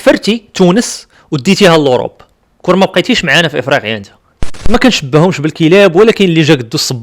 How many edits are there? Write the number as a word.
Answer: one